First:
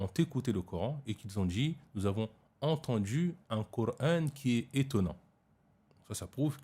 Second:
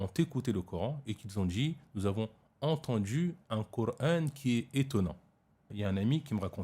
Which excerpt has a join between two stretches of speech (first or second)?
second